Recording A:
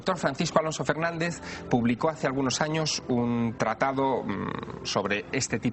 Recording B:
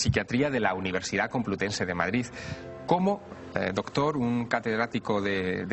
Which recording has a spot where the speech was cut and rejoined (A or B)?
B